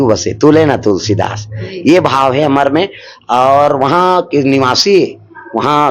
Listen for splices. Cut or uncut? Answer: uncut